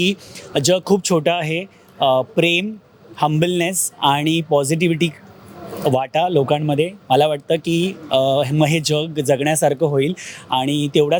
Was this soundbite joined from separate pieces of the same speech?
no; 0 cuts

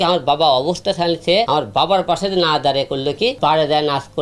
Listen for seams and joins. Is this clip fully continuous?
no; 2 cuts; at 1.5 s, 3.4 s

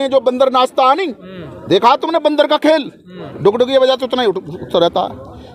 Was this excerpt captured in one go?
yes; 0 cuts

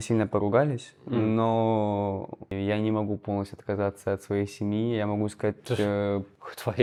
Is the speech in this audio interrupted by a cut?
no; 0 cuts

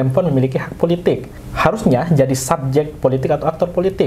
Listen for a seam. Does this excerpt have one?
yes; 1 cut; at 1.4 s

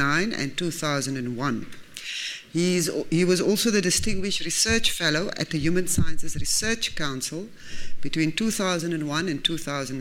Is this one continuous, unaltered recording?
yes; 0 cuts

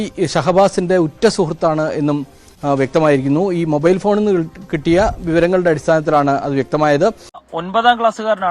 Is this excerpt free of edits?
no; 1 cut; at 7.4 s

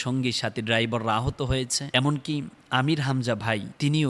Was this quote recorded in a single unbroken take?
no; 1 cut; at 1.8 s

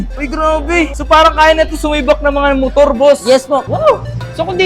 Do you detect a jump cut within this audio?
yes; 2 cuts; at 0.9 s, 3.6 s

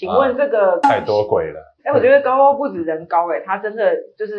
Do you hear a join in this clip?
yes; 2 cuts; at 0.8 s, 1.6 s

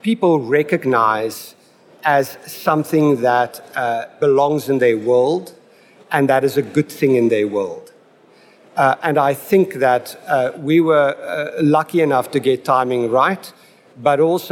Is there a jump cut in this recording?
yes; 1 cut; at 4.1 s

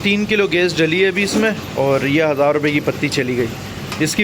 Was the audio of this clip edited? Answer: no; 0 cuts

